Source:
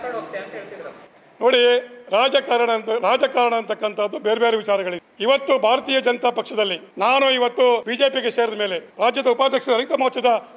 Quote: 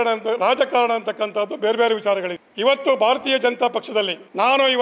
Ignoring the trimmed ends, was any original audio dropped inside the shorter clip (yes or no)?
no